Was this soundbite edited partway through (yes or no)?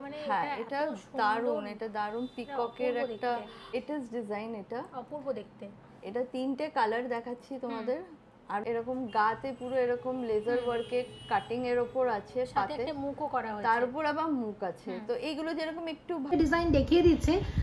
yes